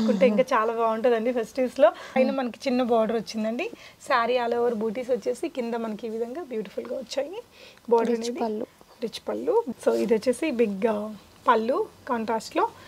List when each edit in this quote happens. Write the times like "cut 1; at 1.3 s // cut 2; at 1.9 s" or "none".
cut 1; at 2.2 s // cut 2; at 9.7 s